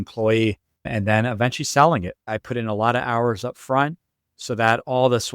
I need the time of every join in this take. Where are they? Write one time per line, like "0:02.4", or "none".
0:02.2